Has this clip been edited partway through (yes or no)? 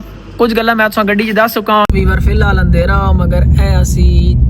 yes